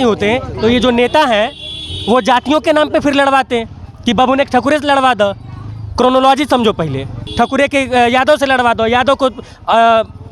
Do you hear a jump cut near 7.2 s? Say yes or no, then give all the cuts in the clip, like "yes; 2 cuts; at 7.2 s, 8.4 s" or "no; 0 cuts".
yes; 1 cut; at 7.2 s